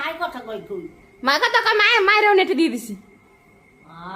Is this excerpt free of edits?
no; 1 cut; at 1.0 s

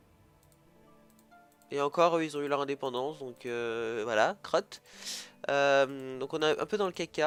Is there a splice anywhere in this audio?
no; 0 cuts

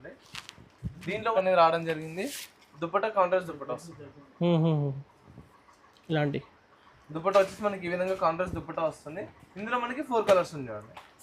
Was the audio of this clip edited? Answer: yes; 1 cut; at 1.3 s

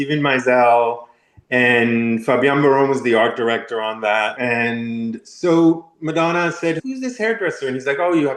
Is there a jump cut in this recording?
yes; 1 cut; at 4.3 s

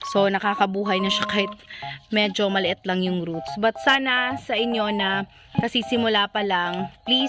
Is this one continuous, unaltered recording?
yes; 0 cuts

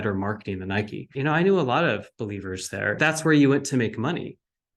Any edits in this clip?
yes; 2 cuts; at 1.1 s, 3.0 s

